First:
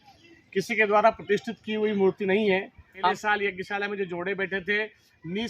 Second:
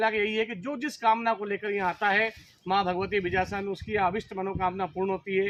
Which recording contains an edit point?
first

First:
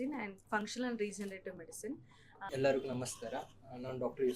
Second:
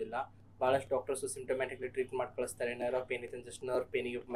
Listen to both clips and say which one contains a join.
first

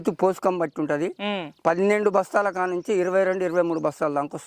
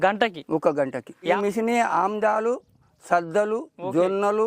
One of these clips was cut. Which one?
second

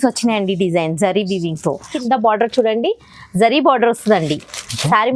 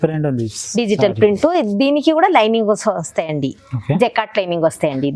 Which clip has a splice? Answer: first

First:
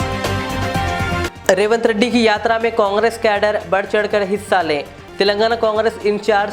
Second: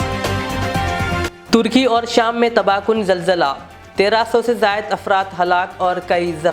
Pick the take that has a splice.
first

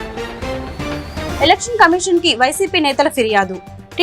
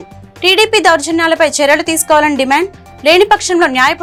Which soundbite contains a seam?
first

